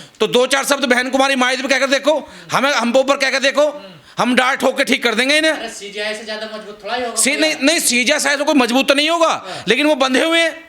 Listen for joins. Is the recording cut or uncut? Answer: uncut